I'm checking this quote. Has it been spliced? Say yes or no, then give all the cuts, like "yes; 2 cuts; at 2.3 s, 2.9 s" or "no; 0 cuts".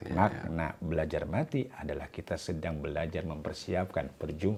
no; 0 cuts